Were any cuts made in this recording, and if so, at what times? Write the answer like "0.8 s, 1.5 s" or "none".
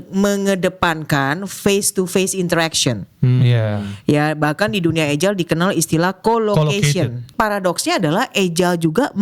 7.3 s